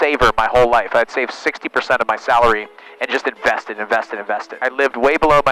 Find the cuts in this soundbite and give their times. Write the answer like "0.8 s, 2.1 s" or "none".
4.6 s